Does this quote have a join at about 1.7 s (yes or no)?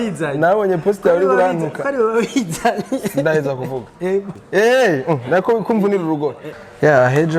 no